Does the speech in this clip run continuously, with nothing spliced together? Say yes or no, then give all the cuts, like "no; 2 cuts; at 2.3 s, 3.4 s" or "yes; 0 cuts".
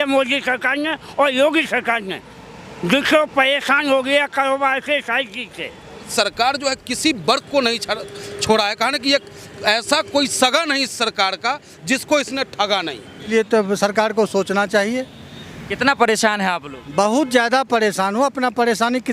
no; 2 cuts; at 6.1 s, 13.3 s